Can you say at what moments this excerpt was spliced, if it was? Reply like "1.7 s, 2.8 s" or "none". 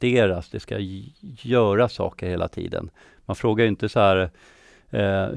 none